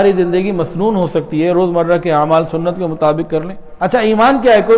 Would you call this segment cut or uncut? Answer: cut